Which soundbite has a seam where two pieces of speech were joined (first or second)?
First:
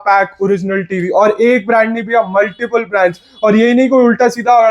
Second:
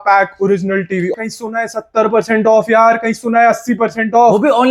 second